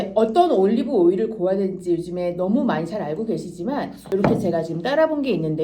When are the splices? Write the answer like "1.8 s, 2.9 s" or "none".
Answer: 4.1 s

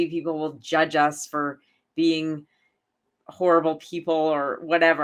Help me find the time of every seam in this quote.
none

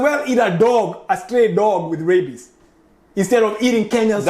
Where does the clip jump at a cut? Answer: none

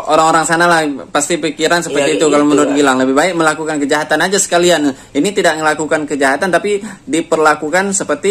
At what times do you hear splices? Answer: none

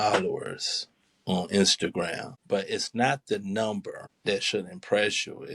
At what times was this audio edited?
2.3 s, 4.0 s

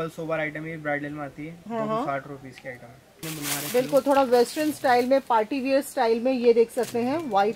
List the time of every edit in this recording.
3.2 s

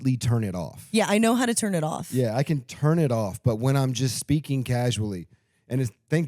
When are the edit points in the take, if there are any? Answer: none

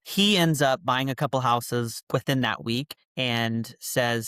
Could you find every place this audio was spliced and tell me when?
3.0 s

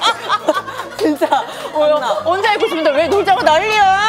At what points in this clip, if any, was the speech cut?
none

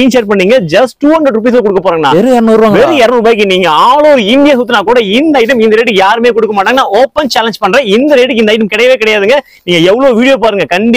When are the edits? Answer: none

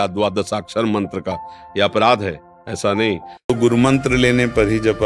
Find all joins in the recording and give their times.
3.5 s

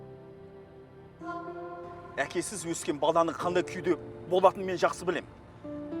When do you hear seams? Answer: 1.0 s, 2.1 s

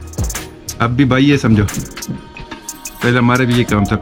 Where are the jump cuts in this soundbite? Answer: none

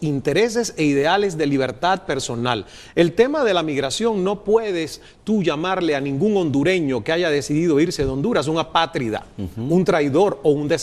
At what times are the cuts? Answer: 1.6 s

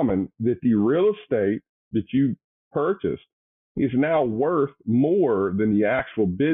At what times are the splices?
1.7 s

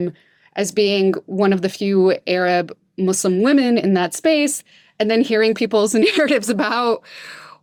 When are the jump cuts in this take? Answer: none

